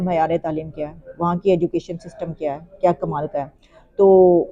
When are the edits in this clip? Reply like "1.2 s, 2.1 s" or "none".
none